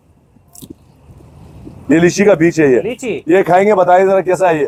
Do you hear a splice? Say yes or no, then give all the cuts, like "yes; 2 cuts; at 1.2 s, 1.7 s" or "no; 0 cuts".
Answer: no; 0 cuts